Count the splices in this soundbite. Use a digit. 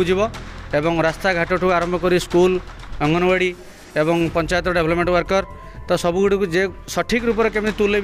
0